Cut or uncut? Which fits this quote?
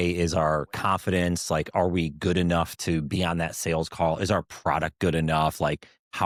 uncut